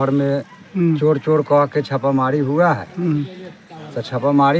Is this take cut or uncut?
uncut